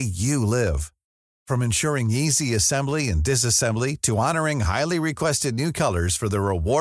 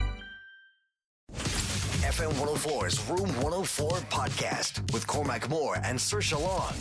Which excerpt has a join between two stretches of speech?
second; 1 cut; at 1.3 s

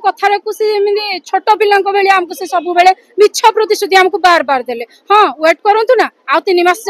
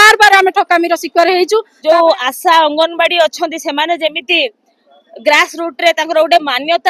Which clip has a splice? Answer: second; 1 cut; at 1.7 s

